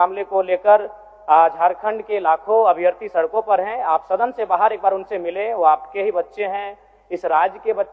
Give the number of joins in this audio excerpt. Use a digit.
0